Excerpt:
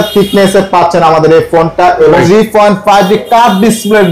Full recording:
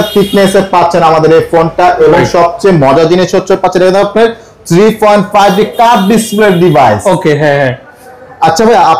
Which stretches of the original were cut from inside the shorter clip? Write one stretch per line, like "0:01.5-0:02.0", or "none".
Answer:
0:02.2-0:04.7